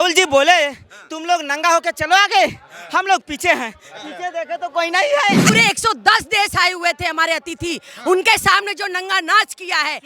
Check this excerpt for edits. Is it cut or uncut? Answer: cut